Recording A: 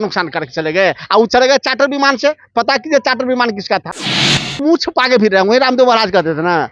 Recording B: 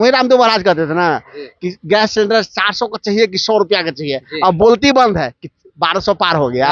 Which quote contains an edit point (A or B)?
A